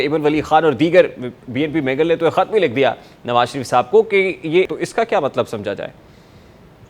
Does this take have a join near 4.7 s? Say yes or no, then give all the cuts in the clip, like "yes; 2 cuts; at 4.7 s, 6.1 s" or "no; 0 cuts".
yes; 1 cut; at 4.7 s